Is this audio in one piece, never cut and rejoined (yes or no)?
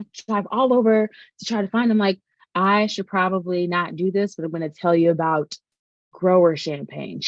yes